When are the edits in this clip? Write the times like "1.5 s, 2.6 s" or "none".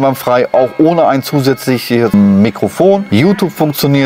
2.1 s, 3.0 s